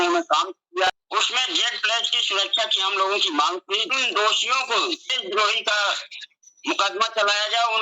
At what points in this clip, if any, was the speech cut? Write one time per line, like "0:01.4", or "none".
0:00.9
0:04.0
0:05.2